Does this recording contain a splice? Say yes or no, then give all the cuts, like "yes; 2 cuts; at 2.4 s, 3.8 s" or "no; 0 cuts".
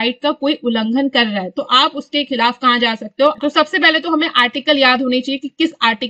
yes; 1 cut; at 3.4 s